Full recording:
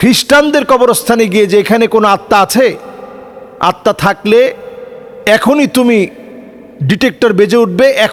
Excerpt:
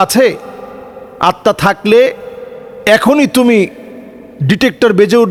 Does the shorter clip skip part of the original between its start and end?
no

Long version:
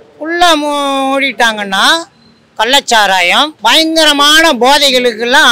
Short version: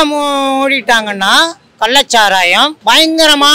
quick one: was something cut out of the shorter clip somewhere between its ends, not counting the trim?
yes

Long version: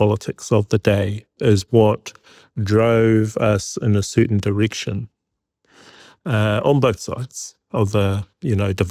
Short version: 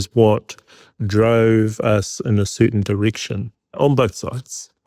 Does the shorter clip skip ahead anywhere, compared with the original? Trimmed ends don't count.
yes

